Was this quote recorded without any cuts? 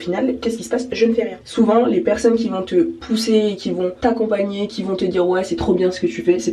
no; 3 cuts; at 1.4 s, 3.0 s, 4.0 s

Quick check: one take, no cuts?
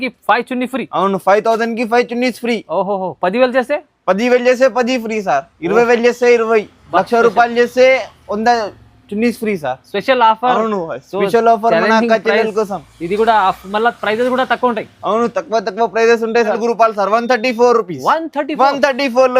no; 1 cut; at 16.5 s

